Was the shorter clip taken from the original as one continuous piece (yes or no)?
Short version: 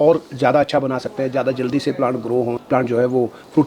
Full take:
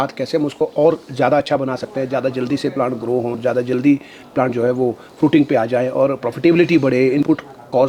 no